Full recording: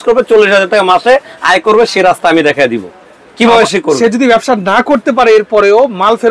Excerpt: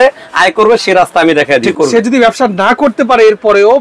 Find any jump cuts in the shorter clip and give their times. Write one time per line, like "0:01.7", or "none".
0:01.7